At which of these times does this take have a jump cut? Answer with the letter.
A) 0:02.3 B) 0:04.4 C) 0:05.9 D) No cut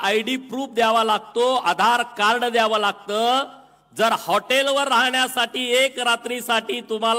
D